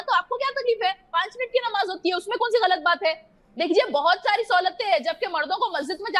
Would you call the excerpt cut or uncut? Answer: uncut